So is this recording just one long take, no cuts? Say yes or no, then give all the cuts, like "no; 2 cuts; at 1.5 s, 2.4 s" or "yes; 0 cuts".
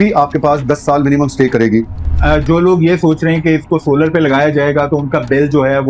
no; 1 cut; at 2.1 s